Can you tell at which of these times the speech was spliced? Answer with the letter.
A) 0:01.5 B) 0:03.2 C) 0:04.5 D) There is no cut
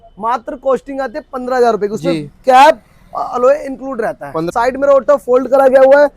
C